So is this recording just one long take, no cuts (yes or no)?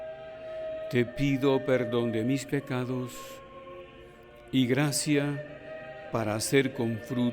no